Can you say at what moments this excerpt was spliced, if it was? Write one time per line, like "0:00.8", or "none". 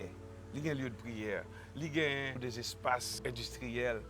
0:02.3
0:03.2